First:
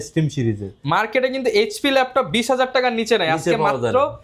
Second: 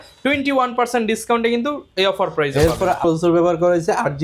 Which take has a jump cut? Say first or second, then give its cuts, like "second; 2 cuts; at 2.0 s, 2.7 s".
second; 1 cut; at 3.0 s